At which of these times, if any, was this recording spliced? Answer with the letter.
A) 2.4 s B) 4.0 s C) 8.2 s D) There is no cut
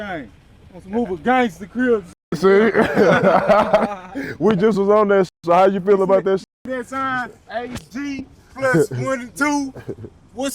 D